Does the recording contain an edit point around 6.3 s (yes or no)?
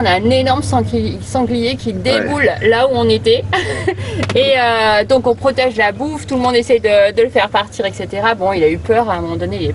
no